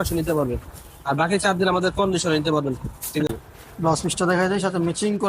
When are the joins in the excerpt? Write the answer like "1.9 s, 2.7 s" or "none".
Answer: 3.3 s